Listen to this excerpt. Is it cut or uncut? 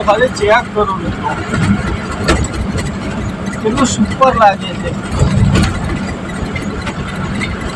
uncut